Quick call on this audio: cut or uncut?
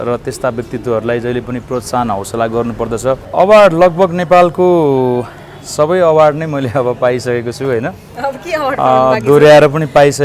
cut